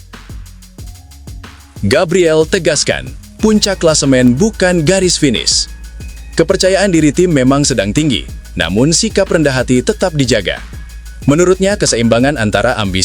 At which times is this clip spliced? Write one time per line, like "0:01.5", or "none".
0:01.8